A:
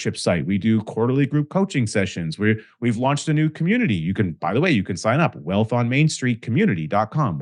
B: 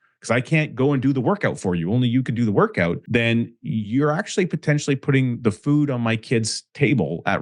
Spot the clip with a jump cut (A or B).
B